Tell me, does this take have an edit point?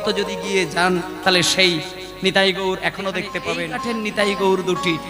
yes; 1 cut; at 3.4 s

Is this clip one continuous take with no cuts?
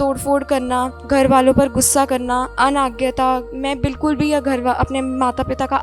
no; 3 cuts; at 1.0 s, 2.5 s, 3.5 s

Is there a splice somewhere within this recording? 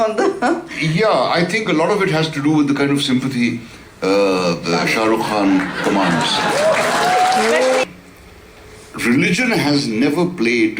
yes; 1 cut; at 7.8 s

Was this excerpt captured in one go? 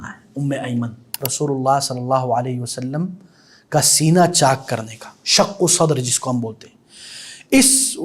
no; 1 cut; at 1.2 s

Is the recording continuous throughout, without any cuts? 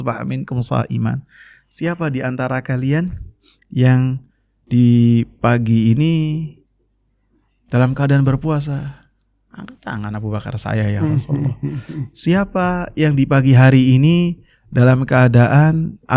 yes; 0 cuts

